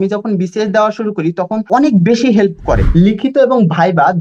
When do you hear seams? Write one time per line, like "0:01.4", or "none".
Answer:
0:01.6
0:02.8